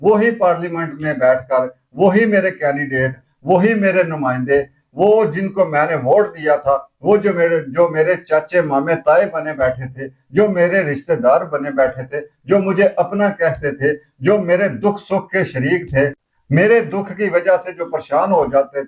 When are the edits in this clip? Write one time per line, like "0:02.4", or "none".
none